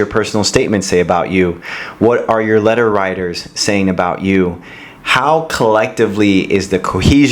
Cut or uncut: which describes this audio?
uncut